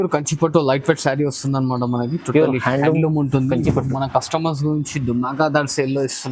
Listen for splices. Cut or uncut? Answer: uncut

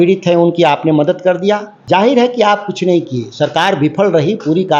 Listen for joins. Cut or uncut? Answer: cut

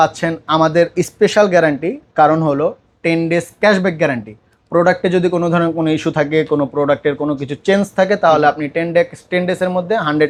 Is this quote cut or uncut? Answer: uncut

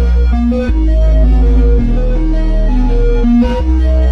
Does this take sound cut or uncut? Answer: uncut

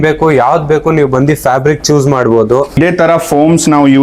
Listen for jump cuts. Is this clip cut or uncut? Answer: cut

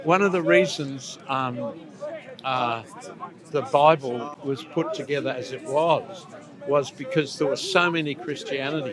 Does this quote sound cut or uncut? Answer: cut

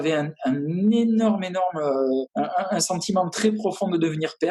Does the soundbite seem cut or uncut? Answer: uncut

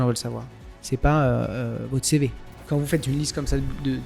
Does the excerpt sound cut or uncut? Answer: cut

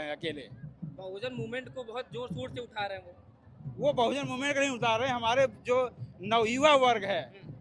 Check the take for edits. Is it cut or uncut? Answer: uncut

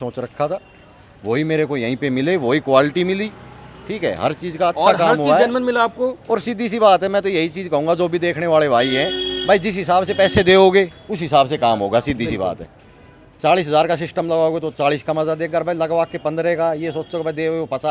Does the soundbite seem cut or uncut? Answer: uncut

